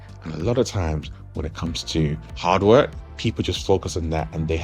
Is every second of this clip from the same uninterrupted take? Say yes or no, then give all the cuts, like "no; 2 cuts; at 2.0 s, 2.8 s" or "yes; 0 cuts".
no; 2 cuts; at 2.3 s, 3.0 s